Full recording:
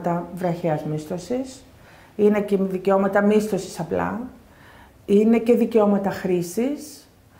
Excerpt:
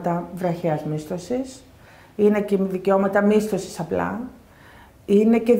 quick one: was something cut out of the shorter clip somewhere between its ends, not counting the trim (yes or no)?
no